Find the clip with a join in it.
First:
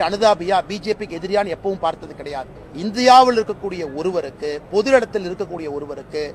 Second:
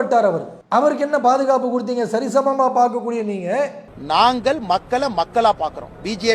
second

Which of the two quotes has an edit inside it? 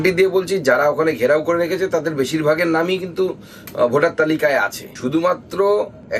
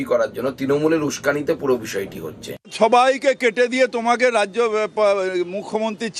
second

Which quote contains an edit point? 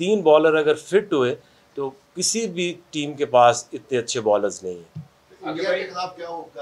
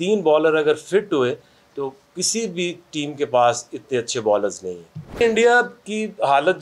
second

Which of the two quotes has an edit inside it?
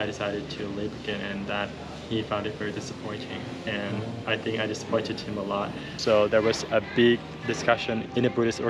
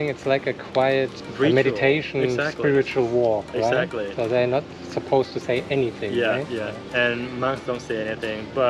first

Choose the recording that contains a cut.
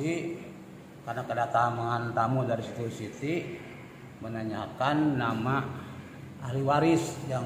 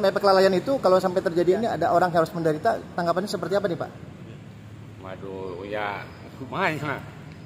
second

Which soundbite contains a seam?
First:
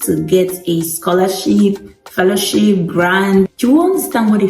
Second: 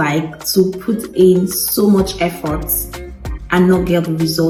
first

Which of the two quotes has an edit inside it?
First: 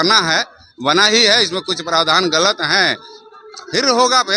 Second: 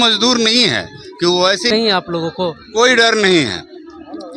second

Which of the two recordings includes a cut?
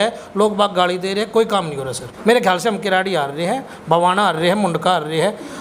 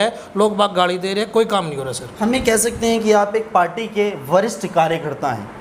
first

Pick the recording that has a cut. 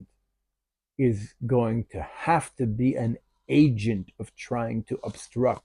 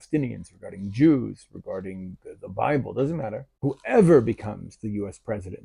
second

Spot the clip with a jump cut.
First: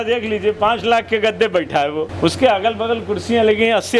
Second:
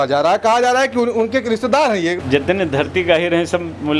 second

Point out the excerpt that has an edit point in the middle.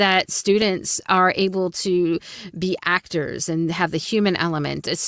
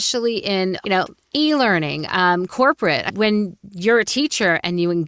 second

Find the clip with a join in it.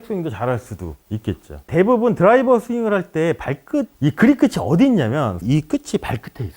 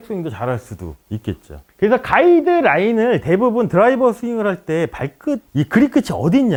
first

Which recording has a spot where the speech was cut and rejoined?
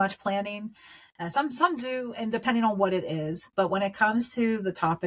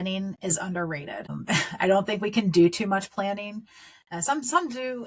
second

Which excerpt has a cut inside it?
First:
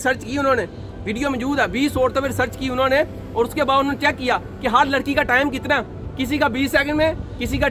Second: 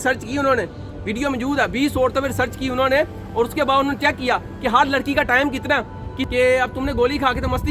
second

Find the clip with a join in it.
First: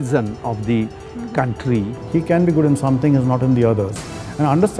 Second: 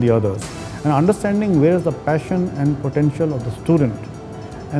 first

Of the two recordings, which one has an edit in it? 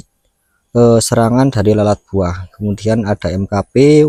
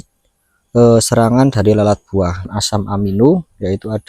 second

